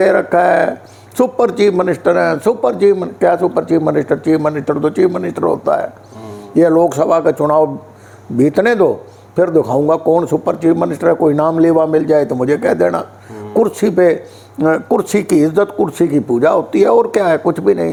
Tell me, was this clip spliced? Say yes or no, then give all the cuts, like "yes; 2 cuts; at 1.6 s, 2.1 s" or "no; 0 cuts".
no; 0 cuts